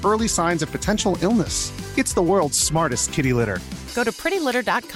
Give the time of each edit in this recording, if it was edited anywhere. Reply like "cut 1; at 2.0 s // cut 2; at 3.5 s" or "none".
none